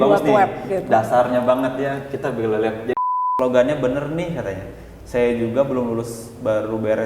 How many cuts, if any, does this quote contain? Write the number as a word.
one